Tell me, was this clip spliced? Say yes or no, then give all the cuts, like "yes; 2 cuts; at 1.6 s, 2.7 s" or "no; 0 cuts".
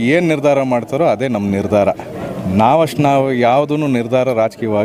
no; 0 cuts